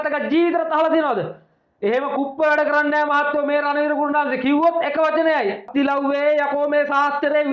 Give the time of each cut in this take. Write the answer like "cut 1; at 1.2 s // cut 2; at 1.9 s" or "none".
cut 1; at 5.6 s